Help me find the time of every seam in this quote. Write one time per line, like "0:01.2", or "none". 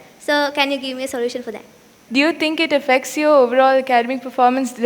0:02.0